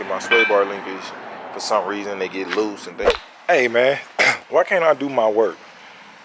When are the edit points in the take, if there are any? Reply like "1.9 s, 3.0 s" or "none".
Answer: 3.1 s